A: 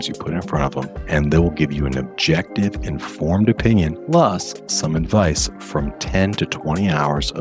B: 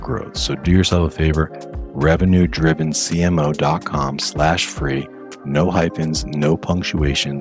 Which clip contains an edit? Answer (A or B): A